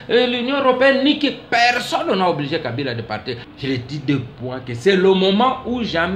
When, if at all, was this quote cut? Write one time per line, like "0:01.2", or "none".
0:03.4